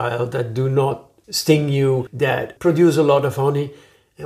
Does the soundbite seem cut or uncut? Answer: uncut